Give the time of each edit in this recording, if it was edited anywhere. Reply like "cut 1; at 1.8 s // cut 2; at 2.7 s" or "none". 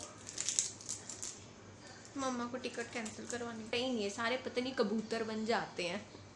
cut 1; at 3.7 s